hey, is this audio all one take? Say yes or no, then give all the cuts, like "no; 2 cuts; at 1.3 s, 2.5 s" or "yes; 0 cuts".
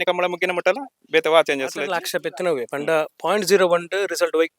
no; 1 cut; at 2.0 s